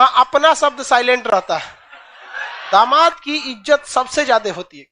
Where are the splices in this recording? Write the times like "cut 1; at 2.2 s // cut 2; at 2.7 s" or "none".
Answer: cut 1; at 2.6 s